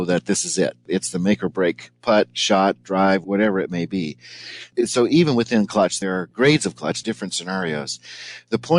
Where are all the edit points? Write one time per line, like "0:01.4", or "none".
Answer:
0:00.9
0:03.2
0:04.6
0:06.0
0:07.0